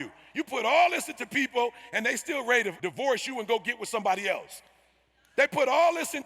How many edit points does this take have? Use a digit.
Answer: 1